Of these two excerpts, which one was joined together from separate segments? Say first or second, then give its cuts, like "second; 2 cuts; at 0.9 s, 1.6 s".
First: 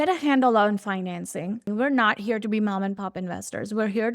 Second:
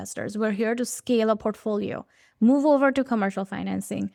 first; 1 cut; at 1.7 s